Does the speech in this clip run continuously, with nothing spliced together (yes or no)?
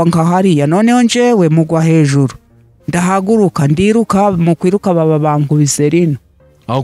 yes